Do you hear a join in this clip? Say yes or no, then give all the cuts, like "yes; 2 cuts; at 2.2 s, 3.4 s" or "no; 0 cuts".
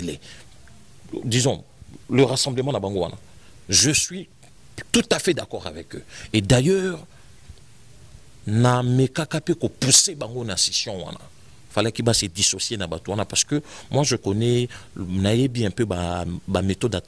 no; 0 cuts